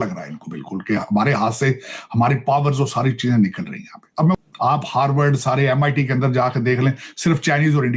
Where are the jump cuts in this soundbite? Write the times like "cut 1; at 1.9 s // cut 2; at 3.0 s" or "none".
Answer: cut 1; at 4.3 s